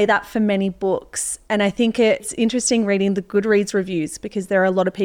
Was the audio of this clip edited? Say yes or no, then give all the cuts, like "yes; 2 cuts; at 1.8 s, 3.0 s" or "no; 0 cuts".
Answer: yes; 1 cut; at 2.3 s